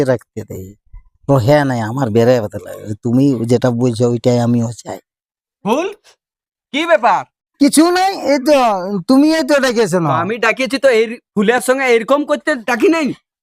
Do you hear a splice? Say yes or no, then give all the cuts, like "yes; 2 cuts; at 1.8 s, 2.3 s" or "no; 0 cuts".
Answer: yes; 1 cut; at 5.6 s